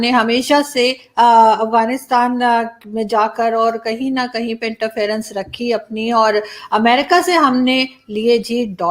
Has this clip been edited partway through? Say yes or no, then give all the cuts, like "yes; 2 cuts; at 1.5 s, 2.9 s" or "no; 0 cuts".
no; 0 cuts